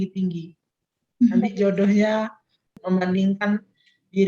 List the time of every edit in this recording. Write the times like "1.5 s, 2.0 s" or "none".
2.8 s